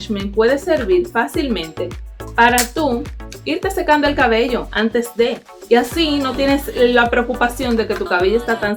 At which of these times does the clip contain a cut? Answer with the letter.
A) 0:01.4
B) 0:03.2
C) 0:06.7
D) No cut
D